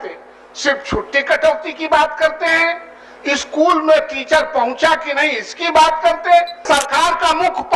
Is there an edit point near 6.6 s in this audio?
yes; 1 cut; at 6.6 s

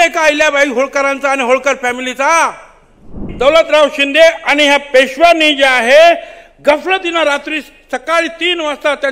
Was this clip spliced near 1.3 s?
no; 1 cut; at 3.2 s

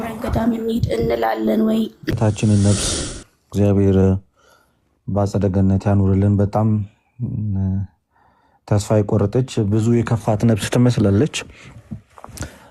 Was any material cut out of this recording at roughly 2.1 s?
yes; 1 cut; at 2.1 s

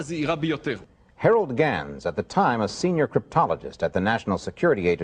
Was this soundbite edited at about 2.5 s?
yes; 1 cut; at 2.5 s

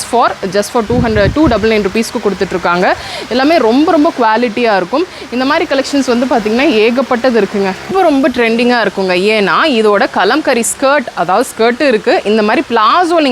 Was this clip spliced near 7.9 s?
yes; 1 cut; at 7.9 s

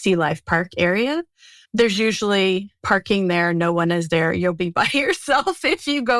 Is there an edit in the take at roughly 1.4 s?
no; 1 cut; at 2.7 s

